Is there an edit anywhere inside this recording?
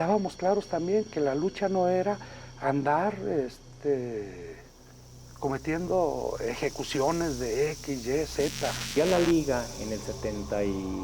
yes; 1 cut; at 8.9 s

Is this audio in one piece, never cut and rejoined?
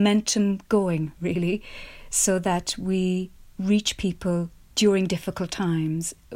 yes; 0 cuts

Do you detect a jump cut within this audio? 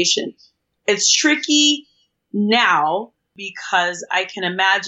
yes; 1 cut; at 3.2 s

